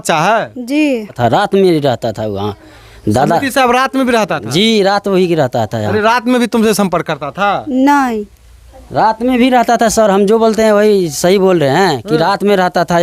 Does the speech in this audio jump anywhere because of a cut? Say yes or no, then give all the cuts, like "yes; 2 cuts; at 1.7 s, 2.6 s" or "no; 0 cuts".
yes; 1 cut; at 1.1 s